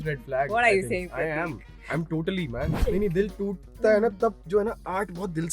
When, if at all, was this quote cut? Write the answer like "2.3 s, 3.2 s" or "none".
2.8 s